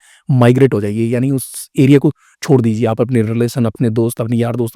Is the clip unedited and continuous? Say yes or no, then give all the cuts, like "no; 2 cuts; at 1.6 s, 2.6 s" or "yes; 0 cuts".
yes; 0 cuts